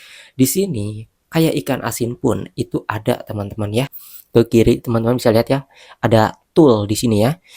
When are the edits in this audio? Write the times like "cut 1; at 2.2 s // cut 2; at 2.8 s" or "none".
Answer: cut 1; at 4.0 s